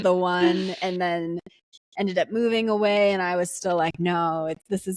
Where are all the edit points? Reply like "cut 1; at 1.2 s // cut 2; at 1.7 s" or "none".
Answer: cut 1; at 1.7 s